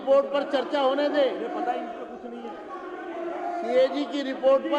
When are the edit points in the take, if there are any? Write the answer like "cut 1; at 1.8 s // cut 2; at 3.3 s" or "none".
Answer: none

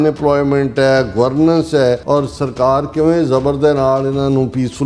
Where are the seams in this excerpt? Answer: cut 1; at 2.0 s

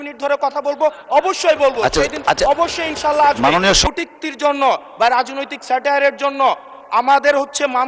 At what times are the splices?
cut 1; at 3.8 s

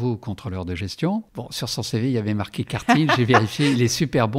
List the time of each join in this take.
cut 1; at 1.4 s

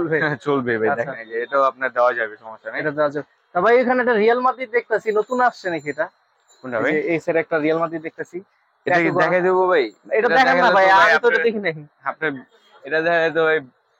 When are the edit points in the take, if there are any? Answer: none

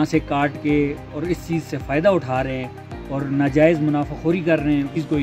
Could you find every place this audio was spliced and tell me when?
none

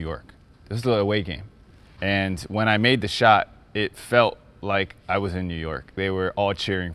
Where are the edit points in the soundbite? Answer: cut 1; at 6.0 s

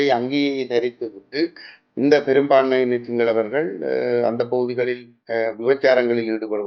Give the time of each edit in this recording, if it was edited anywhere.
none

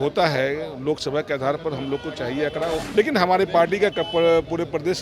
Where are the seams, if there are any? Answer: cut 1; at 2.8 s

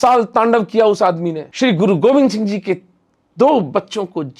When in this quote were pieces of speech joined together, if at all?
cut 1; at 1.4 s

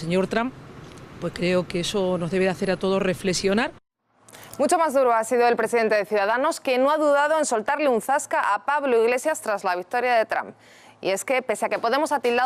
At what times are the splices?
none

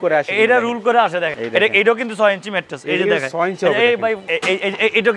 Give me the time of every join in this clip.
cut 1; at 1.3 s // cut 2; at 4.2 s

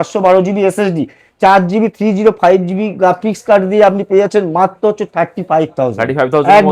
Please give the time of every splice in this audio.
none

